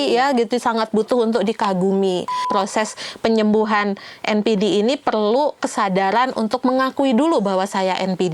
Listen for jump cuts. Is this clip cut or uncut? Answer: cut